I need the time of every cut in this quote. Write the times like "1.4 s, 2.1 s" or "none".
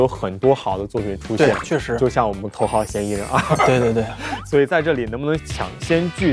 2.4 s, 5.4 s